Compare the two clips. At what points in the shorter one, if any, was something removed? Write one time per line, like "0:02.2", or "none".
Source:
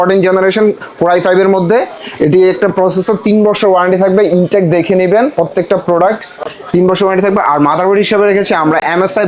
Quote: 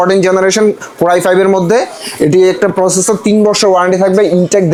none